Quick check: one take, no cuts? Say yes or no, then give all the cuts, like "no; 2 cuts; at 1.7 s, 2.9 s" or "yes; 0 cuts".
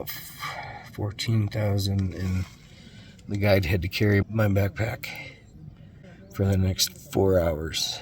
no; 2 cuts; at 4.2 s, 6.1 s